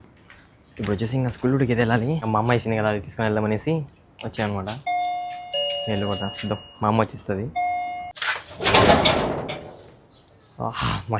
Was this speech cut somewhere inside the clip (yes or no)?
yes